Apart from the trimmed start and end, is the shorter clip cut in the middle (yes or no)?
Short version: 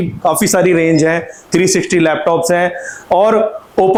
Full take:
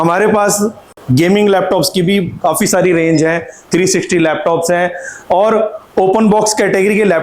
no